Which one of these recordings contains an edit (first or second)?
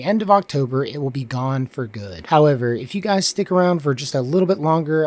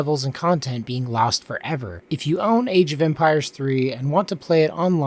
second